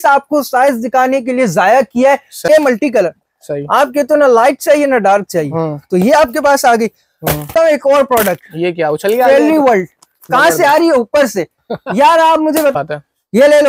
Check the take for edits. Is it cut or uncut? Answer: cut